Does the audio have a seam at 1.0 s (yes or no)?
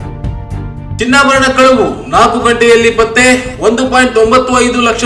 no